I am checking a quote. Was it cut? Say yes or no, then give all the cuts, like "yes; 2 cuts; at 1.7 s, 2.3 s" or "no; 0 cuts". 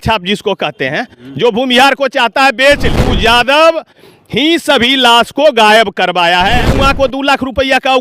yes; 2 cuts; at 3.0 s, 6.7 s